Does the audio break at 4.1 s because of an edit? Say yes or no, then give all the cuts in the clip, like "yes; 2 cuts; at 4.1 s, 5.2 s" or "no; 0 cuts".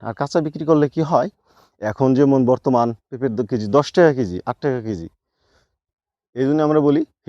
no; 1 cut; at 5.9 s